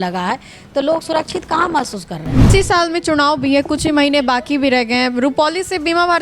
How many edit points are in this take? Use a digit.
1